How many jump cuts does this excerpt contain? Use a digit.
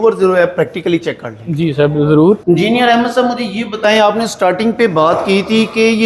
1